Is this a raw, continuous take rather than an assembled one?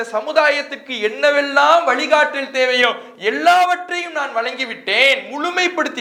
yes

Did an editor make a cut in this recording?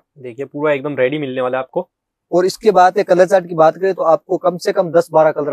no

